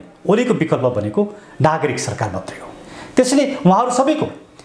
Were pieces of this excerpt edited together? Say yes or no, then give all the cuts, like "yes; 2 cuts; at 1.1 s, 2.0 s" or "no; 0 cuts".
no; 0 cuts